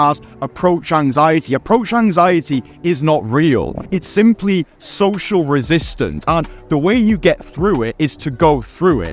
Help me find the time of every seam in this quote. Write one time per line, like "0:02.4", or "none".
none